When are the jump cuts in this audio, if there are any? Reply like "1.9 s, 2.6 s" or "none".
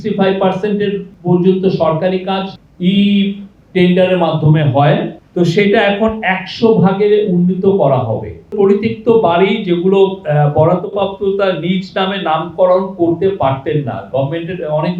1.1 s, 2.5 s, 5.2 s, 8.5 s

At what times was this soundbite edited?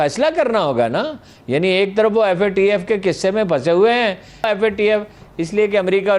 4.5 s

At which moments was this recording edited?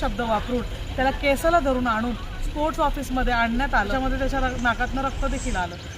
3.9 s

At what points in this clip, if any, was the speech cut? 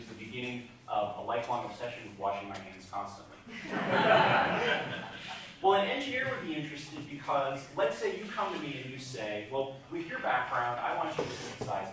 6.5 s

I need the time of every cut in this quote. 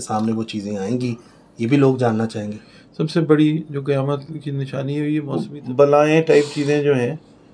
5.3 s

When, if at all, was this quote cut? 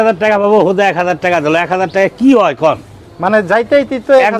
none

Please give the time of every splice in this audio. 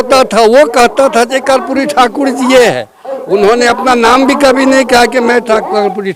none

